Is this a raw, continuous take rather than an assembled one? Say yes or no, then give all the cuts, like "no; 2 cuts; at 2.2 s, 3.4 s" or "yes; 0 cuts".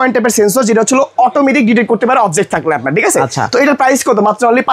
yes; 0 cuts